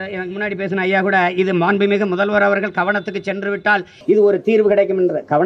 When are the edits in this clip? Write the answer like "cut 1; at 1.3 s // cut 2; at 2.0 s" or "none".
none